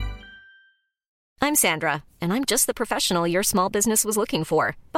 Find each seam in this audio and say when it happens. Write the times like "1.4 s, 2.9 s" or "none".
1.2 s